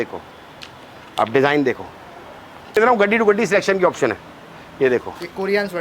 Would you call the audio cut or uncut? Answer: cut